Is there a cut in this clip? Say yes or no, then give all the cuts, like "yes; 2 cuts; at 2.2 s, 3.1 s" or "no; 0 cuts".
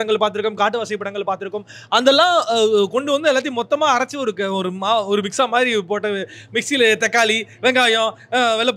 no; 0 cuts